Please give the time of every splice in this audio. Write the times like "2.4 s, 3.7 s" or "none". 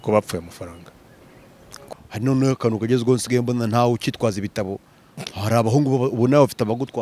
1.8 s

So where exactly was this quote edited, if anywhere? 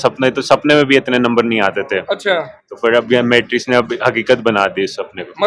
none

